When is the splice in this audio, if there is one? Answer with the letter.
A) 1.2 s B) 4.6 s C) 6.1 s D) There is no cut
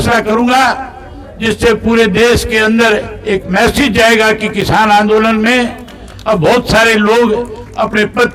D